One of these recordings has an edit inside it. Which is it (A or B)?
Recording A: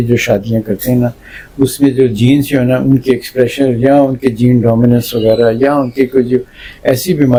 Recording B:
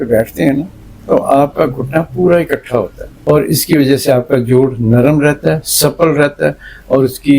B